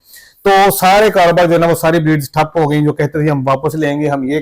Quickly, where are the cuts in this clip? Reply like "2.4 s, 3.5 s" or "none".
none